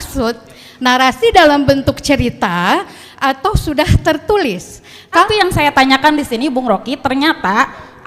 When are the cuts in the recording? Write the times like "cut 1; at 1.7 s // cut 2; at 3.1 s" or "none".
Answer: cut 1; at 5.2 s

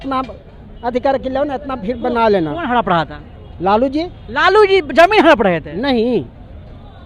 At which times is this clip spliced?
none

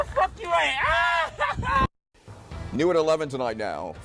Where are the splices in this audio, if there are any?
cut 1; at 2.0 s

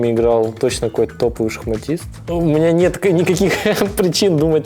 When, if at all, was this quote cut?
cut 1; at 2.1 s

